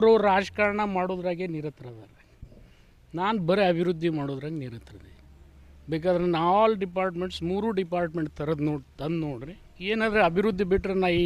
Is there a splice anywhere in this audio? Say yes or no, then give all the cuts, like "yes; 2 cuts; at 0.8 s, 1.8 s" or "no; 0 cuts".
no; 0 cuts